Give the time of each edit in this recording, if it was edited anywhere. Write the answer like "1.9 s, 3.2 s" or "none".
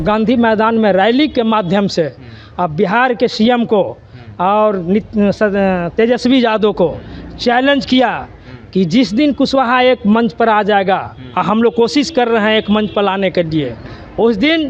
none